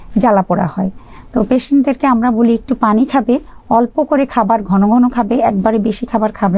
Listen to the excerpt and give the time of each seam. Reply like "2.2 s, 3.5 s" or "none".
none